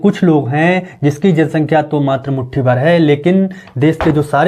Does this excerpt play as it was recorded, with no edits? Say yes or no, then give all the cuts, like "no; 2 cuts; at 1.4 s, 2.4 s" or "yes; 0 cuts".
yes; 0 cuts